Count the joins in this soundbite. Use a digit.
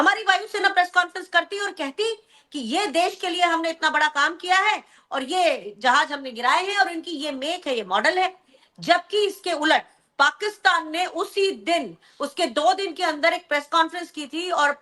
0